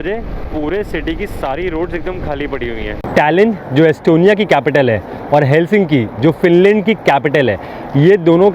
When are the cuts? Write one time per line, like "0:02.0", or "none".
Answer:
0:03.1

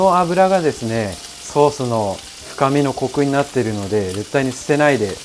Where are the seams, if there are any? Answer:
none

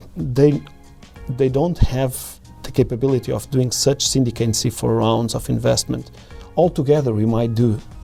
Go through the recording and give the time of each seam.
none

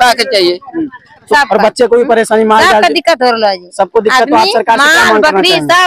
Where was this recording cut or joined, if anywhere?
0:01.3

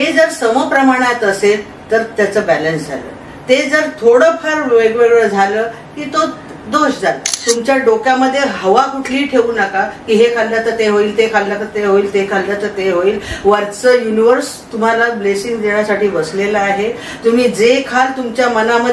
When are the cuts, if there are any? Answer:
0:07.3

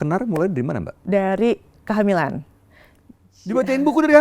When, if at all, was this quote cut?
0:00.9

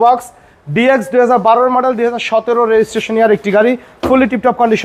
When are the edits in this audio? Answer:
none

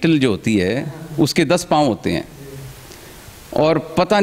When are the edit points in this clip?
none

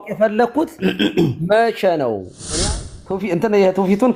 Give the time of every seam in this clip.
0:02.6

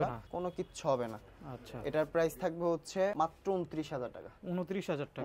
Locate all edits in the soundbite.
none

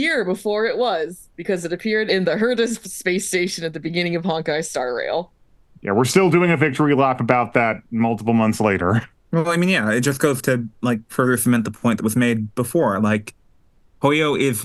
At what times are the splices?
none

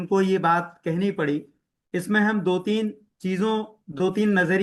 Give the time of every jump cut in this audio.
none

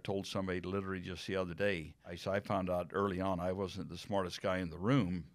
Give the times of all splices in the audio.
0:02.2

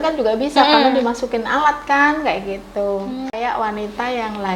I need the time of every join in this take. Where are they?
0:03.3

